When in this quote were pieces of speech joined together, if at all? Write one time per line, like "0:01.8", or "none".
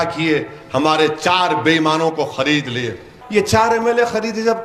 0:03.1